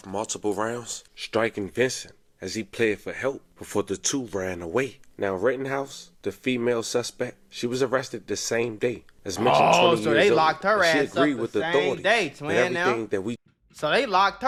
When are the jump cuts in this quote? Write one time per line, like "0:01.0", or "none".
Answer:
none

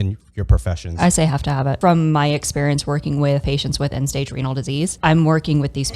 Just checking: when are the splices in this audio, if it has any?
0:01.8
0:03.4
0:04.9

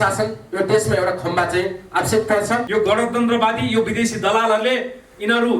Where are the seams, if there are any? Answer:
0:02.7

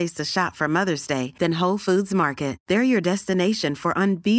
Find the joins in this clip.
none

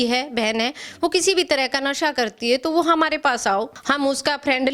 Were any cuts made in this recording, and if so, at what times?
0:03.8

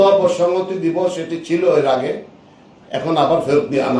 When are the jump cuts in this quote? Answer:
none

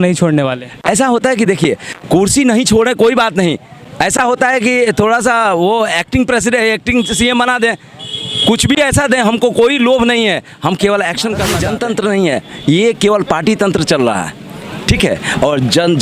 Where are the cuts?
0:11.6

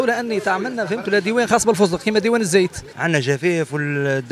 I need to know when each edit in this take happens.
0:02.9

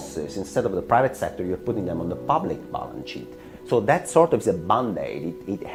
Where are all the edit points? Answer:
none

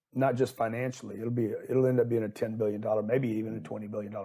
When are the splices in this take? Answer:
none

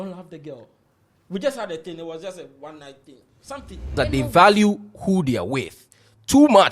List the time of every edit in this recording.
0:04.0

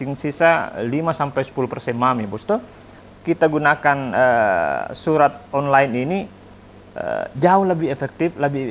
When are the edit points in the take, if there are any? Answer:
0:03.0

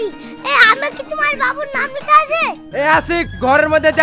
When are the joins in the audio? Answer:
0:02.6

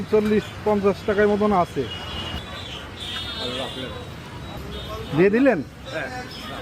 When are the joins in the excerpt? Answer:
0:02.4
0:04.6

